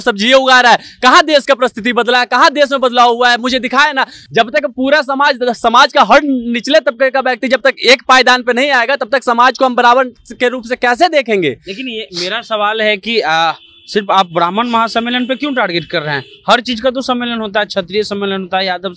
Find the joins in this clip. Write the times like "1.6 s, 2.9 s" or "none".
none